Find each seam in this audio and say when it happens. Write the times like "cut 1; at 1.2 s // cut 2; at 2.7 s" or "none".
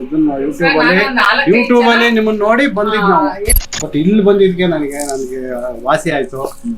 cut 1; at 3.6 s